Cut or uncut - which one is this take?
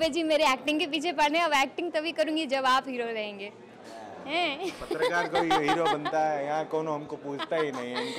uncut